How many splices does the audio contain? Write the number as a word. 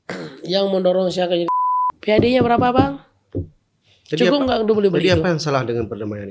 one